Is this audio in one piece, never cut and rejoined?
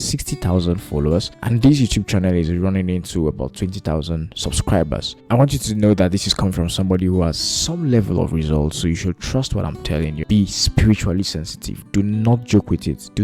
no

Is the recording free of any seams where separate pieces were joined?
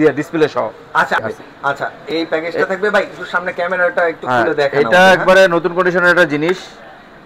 no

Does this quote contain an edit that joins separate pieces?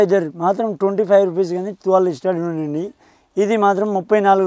no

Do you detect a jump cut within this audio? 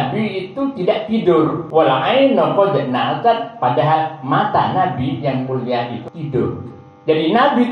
yes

